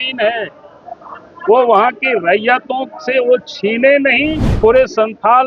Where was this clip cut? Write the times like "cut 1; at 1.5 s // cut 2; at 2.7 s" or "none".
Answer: cut 1; at 4.5 s

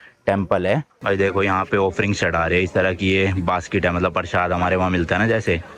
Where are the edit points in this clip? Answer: cut 1; at 1.0 s

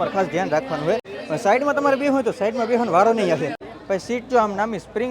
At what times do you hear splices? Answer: cut 1; at 1.2 s // cut 2; at 3.7 s

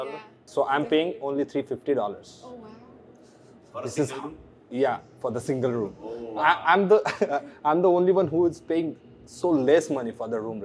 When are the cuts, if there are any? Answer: none

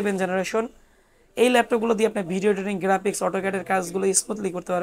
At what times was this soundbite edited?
none

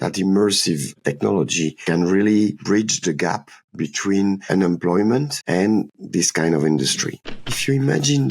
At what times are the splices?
cut 1; at 7.3 s

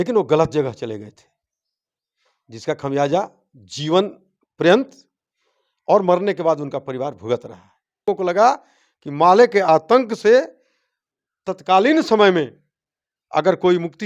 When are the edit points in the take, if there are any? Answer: cut 1; at 8.1 s

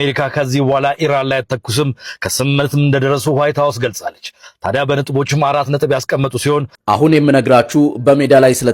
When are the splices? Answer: cut 1; at 6.7 s

